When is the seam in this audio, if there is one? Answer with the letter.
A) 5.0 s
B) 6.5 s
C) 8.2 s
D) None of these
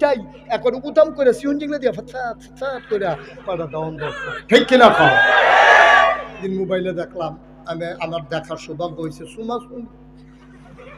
B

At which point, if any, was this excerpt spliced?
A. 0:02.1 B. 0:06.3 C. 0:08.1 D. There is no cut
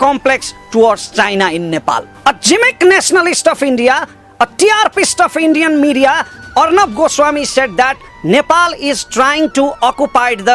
D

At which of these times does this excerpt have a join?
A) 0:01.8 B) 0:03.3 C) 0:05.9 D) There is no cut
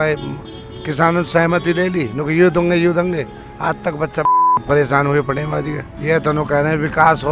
C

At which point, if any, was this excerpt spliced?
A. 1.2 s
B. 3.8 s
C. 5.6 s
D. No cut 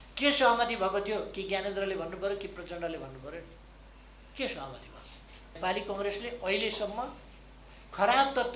C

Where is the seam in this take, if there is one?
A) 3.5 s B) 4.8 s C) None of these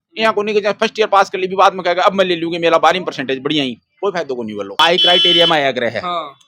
B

